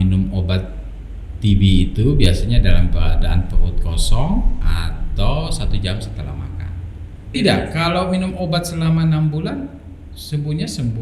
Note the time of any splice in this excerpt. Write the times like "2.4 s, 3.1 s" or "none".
7.3 s